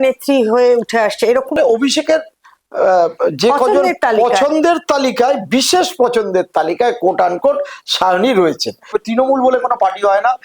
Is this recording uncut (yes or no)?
no